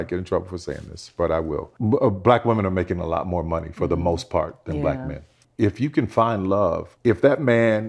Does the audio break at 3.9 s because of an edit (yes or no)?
no